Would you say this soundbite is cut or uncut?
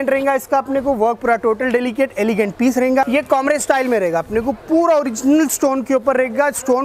cut